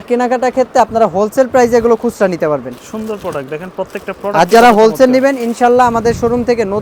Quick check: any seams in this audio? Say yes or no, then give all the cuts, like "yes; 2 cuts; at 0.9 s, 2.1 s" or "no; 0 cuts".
no; 0 cuts